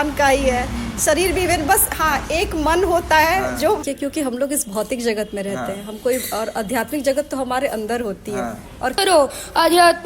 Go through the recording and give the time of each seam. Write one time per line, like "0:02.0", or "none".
0:03.6
0:09.0

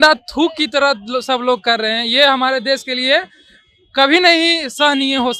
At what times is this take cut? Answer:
none

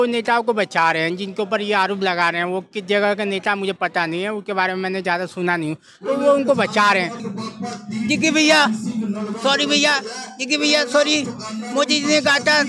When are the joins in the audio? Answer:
0:07.2

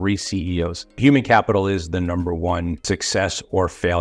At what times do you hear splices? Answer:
0:01.0
0:03.0

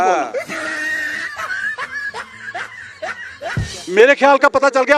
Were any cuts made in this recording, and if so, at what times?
0:03.7

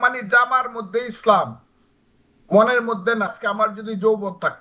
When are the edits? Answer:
0:03.4

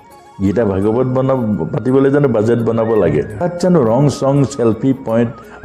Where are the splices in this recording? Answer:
0:03.4

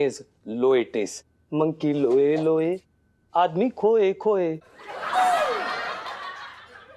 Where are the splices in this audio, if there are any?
none

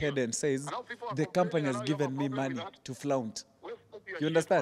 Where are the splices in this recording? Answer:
none

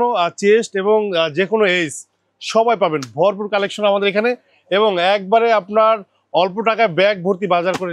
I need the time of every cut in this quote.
none

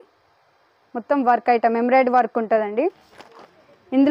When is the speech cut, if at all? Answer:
0:03.0

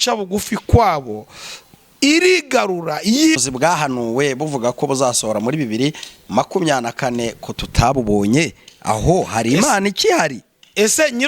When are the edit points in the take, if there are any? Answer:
0:03.4

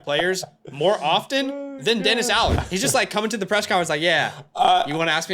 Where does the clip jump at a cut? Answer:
0:02.6

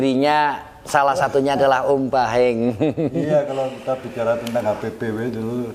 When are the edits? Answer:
none

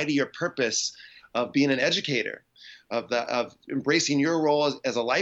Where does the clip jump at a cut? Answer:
none

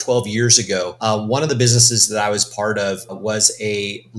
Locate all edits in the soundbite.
0:00.9

